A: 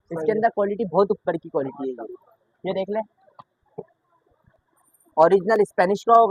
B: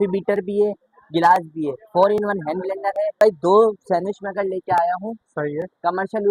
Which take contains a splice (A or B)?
B